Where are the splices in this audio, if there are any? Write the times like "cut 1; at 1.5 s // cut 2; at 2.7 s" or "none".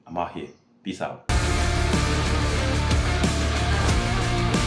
cut 1; at 1.3 s